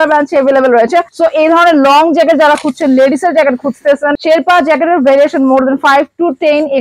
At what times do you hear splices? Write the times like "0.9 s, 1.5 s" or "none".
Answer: 1.1 s, 4.1 s

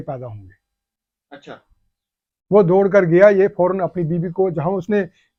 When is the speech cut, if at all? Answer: none

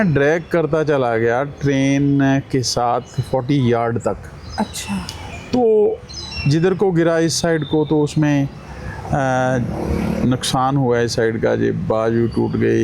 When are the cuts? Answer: none

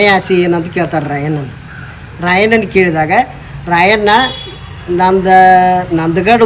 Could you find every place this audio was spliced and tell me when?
none

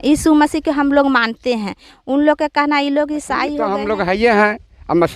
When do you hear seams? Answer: 3.6 s

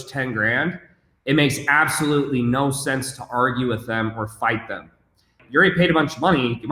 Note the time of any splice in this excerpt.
5.4 s

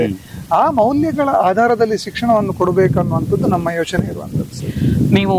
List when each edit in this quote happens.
none

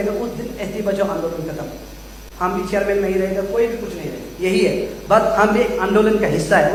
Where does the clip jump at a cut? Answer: none

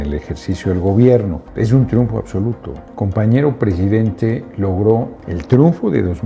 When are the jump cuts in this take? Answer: 1.4 s, 5.2 s

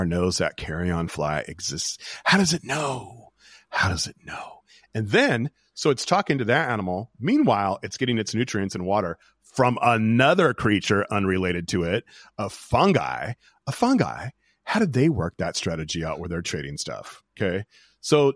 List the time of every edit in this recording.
none

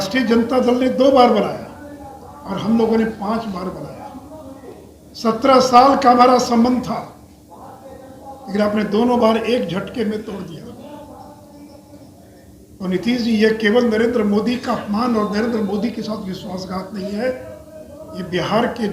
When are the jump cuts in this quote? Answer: 12.7 s

